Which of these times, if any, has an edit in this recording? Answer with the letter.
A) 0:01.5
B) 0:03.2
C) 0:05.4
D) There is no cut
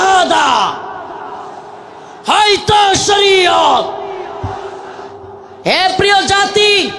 C